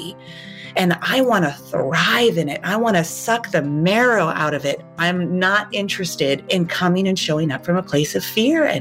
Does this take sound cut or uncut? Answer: cut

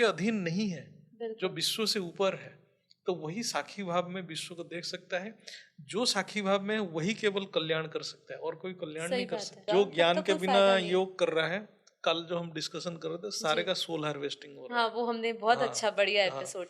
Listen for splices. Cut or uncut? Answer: cut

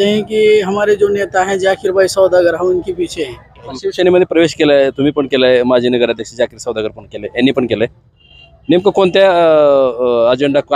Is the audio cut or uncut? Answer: cut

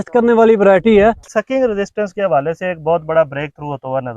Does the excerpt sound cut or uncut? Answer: cut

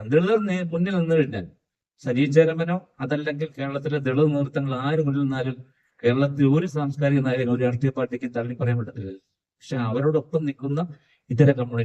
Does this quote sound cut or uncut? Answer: uncut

